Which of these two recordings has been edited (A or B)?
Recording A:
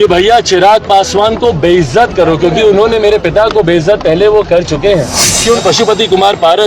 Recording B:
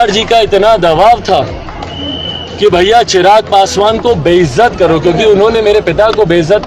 A